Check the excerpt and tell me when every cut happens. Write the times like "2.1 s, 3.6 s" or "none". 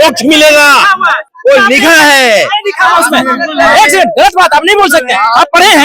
none